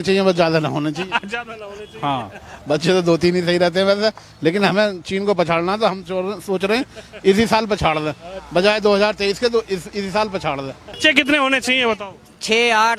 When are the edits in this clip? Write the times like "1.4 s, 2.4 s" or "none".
10.9 s